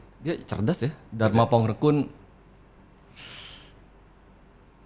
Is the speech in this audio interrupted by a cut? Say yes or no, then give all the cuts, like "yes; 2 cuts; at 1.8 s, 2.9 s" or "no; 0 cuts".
yes; 1 cut; at 1.0 s